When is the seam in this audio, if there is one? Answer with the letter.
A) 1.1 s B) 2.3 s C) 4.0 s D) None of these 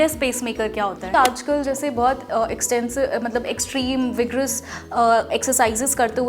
A